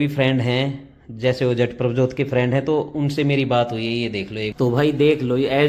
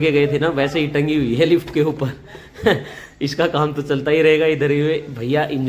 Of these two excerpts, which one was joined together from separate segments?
first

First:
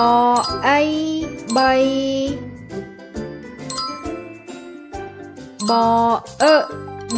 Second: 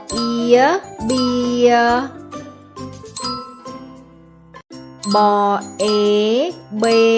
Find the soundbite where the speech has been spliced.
first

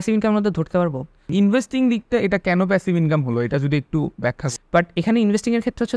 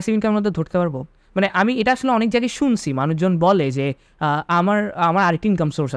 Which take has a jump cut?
first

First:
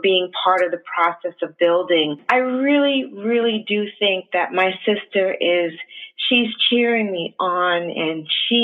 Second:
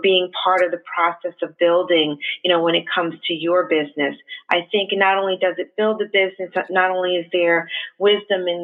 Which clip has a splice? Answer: first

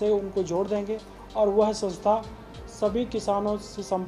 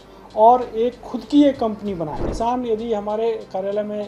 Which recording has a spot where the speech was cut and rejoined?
second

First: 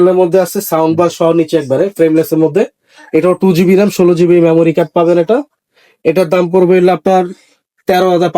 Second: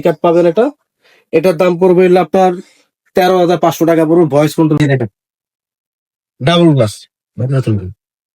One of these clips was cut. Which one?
second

